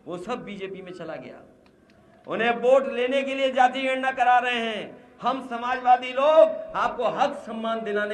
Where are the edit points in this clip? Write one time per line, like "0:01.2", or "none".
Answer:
none